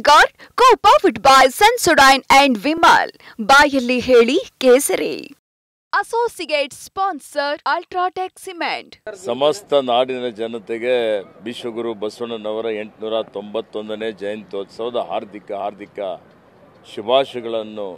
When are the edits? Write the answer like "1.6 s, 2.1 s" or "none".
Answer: 8.9 s